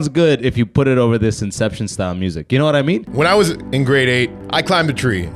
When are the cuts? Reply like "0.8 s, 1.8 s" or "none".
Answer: 3.1 s, 4.4 s

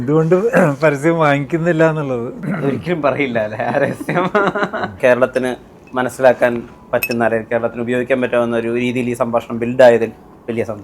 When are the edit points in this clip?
2.4 s, 5.0 s

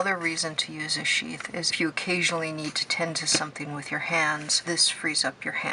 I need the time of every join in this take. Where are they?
1.7 s, 4.6 s

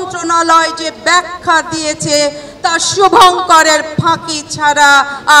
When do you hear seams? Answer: none

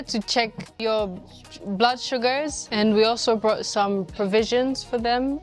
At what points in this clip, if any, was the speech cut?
0.8 s, 2.6 s

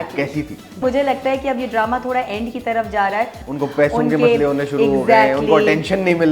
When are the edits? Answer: 0.8 s, 3.4 s

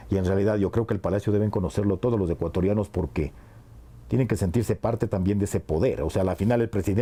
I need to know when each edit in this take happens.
none

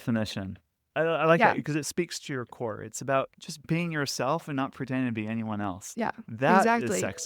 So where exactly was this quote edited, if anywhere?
3.6 s

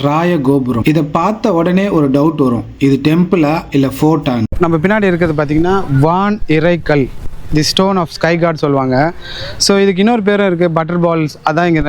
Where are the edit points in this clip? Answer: 0.8 s, 4.5 s

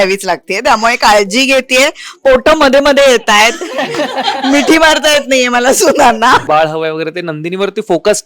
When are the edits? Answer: 6.4 s

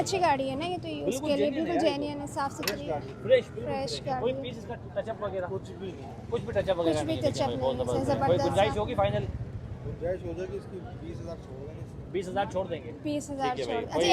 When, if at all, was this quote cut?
none

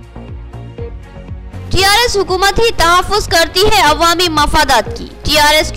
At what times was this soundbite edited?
1.1 s

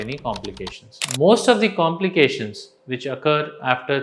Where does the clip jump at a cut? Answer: 1.0 s

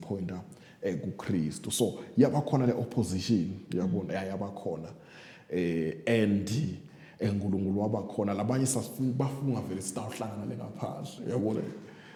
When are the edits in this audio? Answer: none

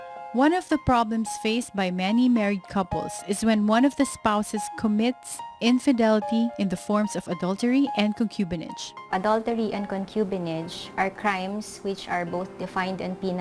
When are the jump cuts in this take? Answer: 2.3 s

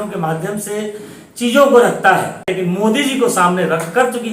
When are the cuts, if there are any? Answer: 2.5 s

